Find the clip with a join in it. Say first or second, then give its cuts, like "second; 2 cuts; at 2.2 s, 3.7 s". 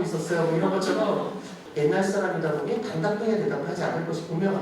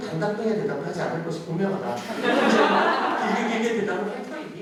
first; 1 cut; at 1.6 s